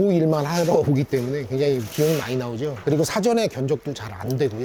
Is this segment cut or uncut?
uncut